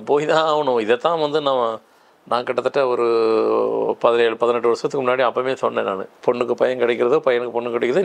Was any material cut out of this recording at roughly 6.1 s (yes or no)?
yes